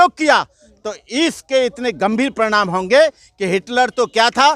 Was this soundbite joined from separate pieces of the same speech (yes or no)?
no